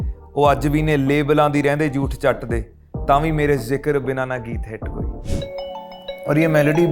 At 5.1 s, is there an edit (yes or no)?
yes